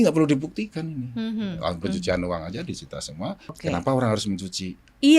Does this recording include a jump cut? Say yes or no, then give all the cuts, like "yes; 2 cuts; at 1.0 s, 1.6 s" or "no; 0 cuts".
yes; 1 cut; at 3.6 s